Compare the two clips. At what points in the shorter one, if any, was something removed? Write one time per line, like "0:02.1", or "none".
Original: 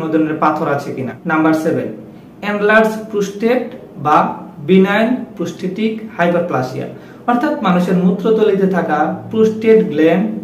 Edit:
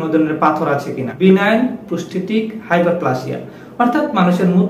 0:01.0